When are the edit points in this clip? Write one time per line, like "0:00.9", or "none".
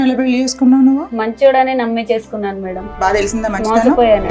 0:02.8